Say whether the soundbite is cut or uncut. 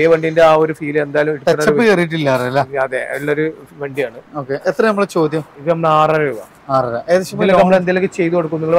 uncut